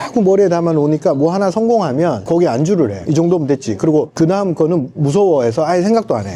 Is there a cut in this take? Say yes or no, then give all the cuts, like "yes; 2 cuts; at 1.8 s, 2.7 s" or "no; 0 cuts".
yes; 3 cuts; at 2.2 s, 3.0 s, 4.1 s